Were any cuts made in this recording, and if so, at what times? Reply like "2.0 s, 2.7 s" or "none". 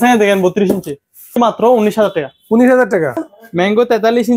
1.4 s, 3.2 s

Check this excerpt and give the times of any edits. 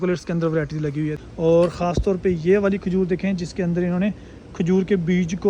1.2 s

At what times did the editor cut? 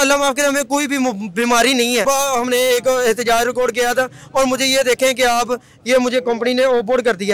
2.0 s

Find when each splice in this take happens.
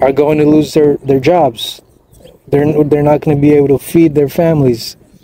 none

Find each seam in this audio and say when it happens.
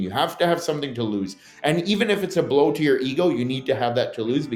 none

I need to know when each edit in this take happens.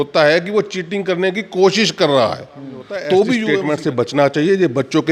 3.5 s

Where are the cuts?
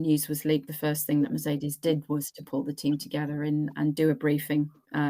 3.9 s

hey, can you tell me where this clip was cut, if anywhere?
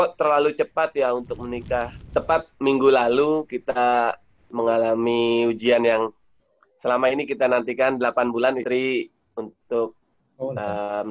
2.0 s

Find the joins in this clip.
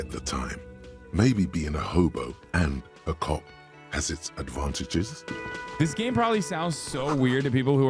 5.2 s

